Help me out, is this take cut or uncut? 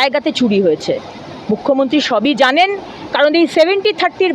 uncut